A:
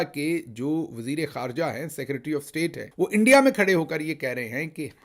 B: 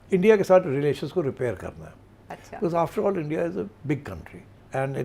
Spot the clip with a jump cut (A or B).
A